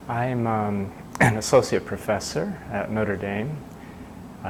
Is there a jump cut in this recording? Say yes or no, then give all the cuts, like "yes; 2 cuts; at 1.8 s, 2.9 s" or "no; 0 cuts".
no; 0 cuts